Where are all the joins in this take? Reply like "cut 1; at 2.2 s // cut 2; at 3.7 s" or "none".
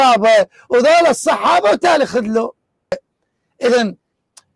cut 1; at 3.1 s